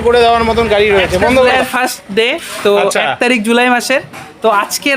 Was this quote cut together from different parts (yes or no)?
yes